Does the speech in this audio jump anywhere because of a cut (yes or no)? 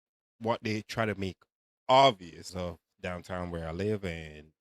yes